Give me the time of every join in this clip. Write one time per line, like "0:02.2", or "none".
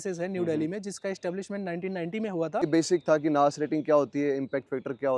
0:02.6

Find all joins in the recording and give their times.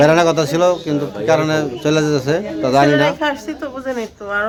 none

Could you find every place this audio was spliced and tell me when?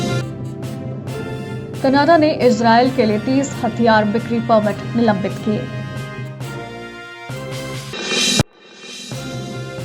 0:08.9

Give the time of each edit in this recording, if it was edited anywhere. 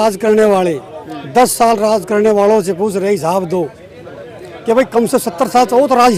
none

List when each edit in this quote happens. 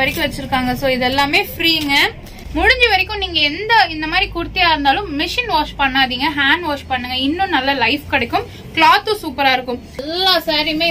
0:02.4
0:10.0

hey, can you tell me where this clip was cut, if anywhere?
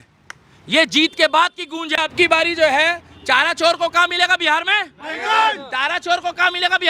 0:02.0

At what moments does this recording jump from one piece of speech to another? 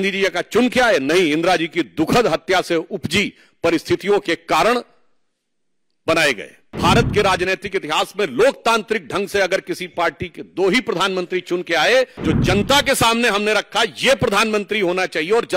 0:06.8
0:12.2

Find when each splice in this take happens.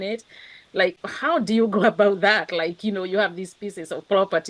0:01.1

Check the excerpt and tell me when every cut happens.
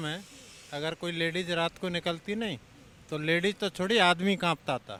none

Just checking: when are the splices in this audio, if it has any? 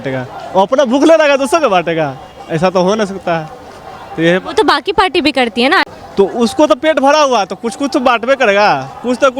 0:05.9

